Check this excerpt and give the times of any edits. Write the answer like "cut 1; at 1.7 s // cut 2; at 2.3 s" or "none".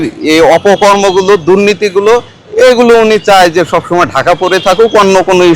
none